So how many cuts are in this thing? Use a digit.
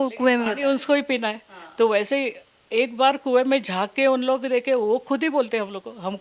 0